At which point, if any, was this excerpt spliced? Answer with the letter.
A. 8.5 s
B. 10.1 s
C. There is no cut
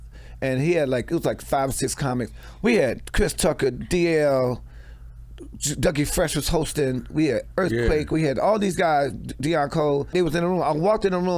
B